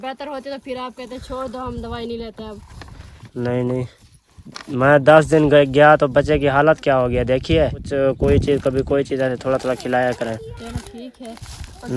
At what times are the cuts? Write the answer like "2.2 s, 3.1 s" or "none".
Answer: 7.8 s